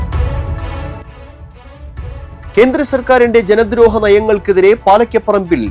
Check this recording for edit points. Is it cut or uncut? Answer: cut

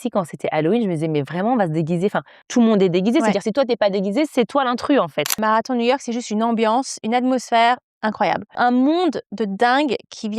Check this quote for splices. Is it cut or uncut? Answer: cut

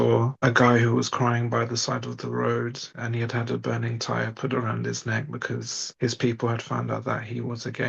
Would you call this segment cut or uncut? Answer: cut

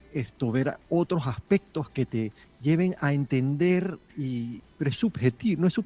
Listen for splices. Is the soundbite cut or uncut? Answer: cut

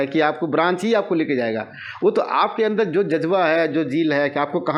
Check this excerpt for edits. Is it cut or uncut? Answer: uncut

